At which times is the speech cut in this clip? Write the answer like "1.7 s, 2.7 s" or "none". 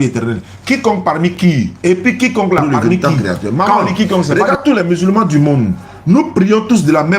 4.3 s